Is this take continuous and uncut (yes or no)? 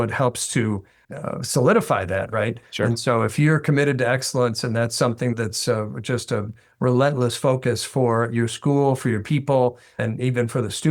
no